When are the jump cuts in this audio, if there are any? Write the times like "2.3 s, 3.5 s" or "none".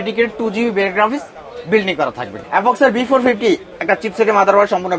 2.3 s

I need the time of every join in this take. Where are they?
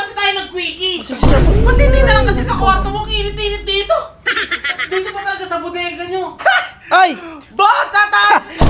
6.4 s

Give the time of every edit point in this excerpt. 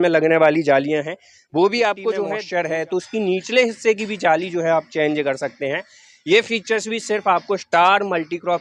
2.4 s

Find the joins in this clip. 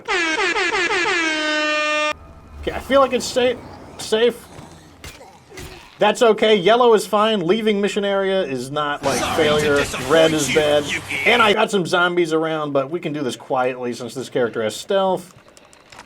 2.1 s, 11.6 s

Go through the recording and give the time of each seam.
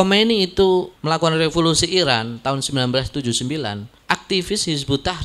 1.0 s, 3.9 s

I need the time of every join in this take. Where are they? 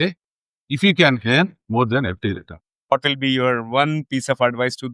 2.9 s

